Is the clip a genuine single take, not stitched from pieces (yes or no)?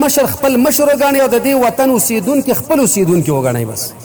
yes